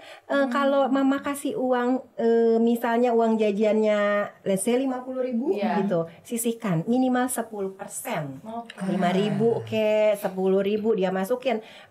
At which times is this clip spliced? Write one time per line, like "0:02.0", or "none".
none